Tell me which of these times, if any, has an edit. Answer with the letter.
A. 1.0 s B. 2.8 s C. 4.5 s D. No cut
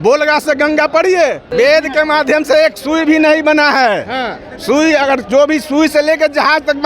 A